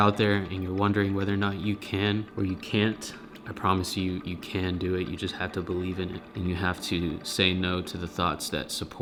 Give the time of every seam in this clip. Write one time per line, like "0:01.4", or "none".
none